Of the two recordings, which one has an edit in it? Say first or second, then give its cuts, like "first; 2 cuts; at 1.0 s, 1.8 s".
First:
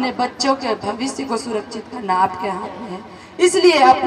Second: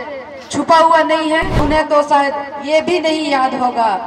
second; 1 cut; at 1.6 s